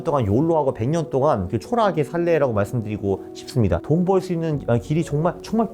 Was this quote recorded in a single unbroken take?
no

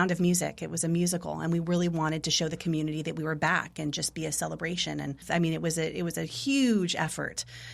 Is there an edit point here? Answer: yes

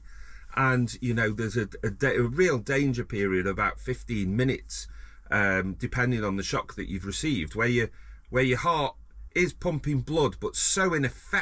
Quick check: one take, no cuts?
yes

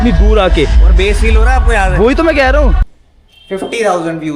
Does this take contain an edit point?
yes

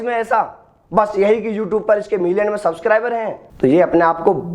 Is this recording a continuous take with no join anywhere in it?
no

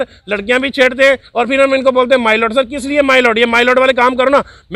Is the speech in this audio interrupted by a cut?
no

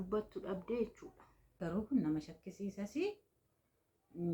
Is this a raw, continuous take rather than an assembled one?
no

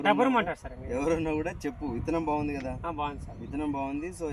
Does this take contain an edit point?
no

